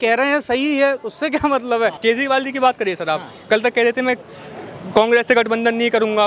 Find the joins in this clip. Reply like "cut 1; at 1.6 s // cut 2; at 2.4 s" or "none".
cut 1; at 2.0 s